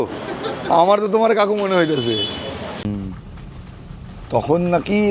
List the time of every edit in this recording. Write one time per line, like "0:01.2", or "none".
0:02.9